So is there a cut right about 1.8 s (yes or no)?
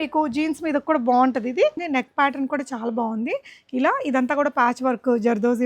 yes